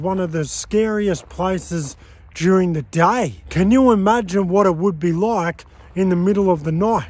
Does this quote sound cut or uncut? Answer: cut